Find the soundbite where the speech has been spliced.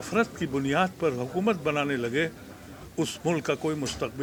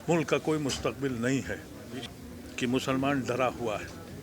second; 1 cut; at 2.1 s

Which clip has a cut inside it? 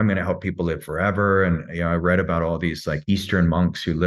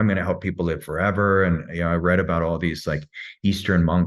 first; 1 cut; at 3.0 s

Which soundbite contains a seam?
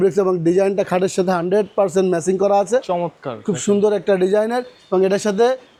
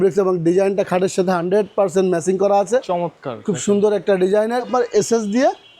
second; 1 cut; at 4.7 s

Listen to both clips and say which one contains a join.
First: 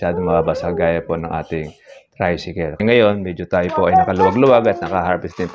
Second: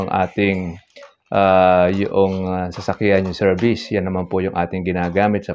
first; 1 cut; at 2.8 s

